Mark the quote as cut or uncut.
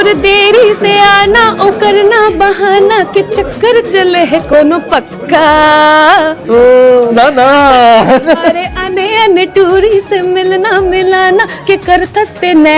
uncut